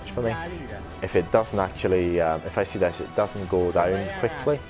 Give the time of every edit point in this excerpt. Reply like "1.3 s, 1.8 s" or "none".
none